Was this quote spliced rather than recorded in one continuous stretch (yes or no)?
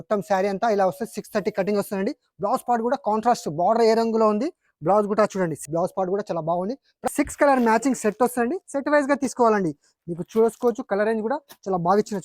yes